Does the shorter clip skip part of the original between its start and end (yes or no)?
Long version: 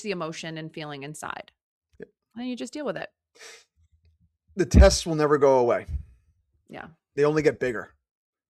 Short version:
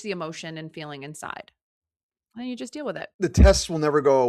yes